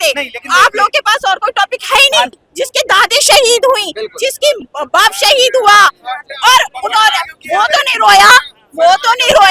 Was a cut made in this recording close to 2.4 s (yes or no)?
yes